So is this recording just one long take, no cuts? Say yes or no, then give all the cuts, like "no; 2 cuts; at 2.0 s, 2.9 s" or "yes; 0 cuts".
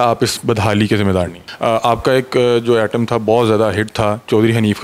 no; 1 cut; at 1.4 s